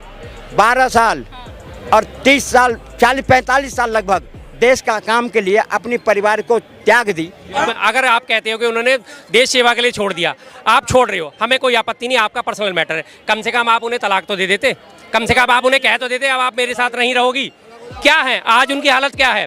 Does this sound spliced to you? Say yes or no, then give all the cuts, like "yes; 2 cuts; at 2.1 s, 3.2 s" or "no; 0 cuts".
yes; 1 cut; at 7.8 s